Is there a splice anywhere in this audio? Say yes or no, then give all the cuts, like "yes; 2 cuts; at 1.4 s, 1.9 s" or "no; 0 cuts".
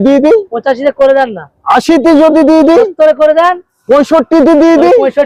no; 0 cuts